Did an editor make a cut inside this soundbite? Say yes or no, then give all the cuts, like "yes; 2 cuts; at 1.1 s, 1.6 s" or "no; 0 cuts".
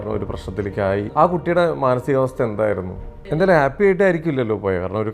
yes; 2 cuts; at 1.1 s, 3.3 s